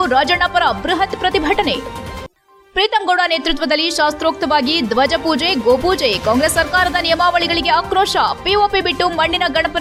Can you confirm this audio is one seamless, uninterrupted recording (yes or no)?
yes